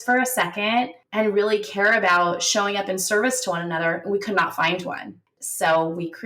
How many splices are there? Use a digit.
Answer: 2